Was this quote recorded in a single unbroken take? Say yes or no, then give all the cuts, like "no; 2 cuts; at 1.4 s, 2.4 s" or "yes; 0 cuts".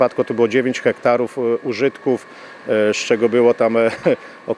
yes; 0 cuts